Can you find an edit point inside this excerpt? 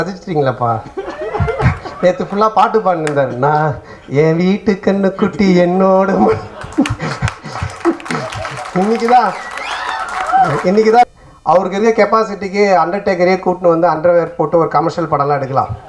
yes; 1 cut; at 11.1 s

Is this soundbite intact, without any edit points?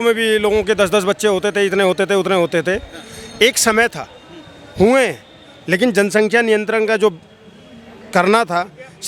yes; 0 cuts

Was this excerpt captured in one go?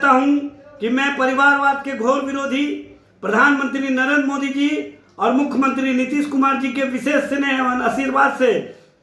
yes; 0 cuts

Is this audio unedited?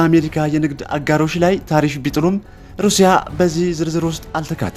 yes; 0 cuts

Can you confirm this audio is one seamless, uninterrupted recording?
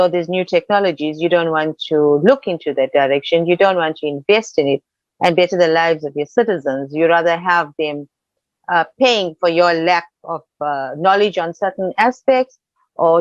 yes; 0 cuts

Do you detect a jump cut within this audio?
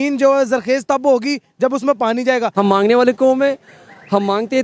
yes; 1 cut; at 2.5 s

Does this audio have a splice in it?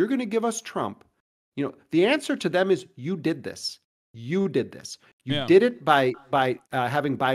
no; 0 cuts

